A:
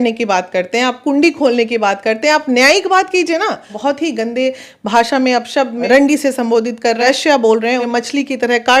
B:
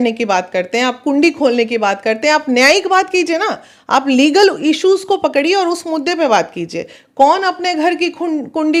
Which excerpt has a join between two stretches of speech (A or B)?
A